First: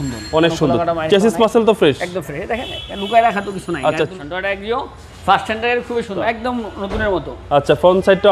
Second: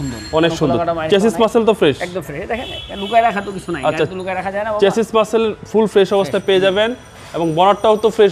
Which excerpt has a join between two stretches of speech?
first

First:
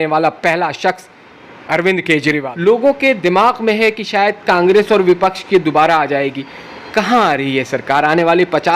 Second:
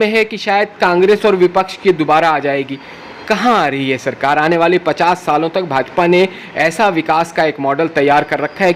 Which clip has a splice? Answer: first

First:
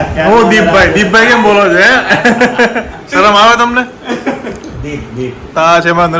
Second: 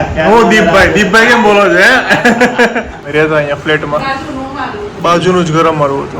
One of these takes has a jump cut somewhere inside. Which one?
second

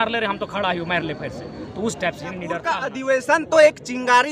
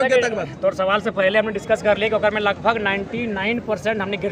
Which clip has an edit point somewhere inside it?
first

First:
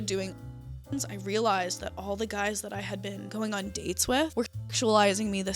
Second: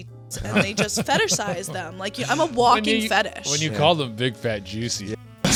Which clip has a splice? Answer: first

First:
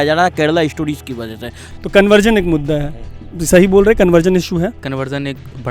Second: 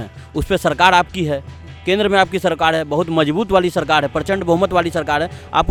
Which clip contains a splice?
first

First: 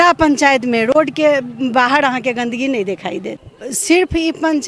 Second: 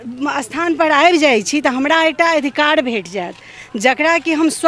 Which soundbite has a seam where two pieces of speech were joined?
first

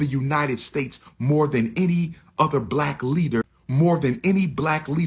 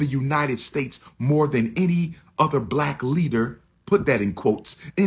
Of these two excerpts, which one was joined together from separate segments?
first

